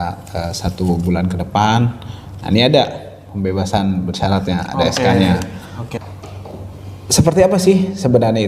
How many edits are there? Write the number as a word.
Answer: one